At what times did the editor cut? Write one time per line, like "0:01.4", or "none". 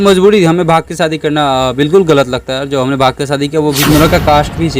0:03.8

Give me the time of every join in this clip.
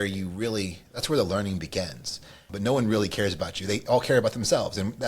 0:02.5

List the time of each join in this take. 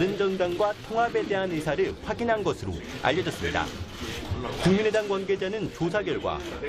none

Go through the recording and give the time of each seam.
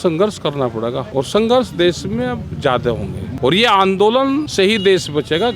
0:01.0
0:03.3
0:04.5

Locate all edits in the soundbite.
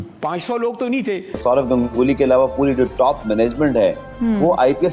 0:01.4

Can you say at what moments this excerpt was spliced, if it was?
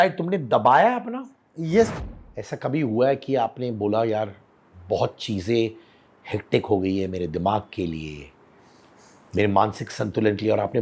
0:01.9

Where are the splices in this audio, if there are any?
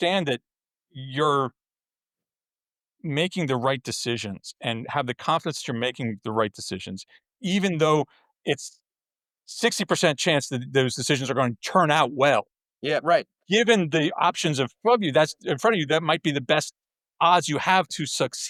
none

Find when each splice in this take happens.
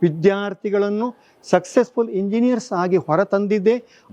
none

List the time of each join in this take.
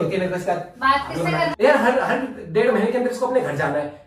0:01.5

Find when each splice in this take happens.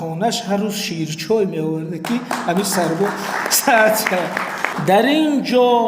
0:04.7

